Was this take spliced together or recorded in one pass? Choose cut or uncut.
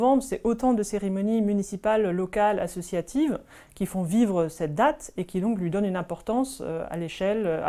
uncut